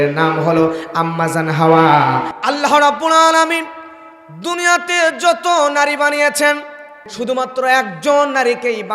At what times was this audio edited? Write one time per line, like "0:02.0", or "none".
0:02.3
0:07.1

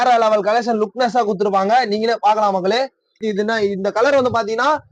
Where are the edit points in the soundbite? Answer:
0:03.2

